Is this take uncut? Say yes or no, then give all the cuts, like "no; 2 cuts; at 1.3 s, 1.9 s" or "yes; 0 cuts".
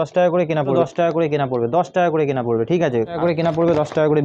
no; 2 cuts; at 0.8 s, 3.2 s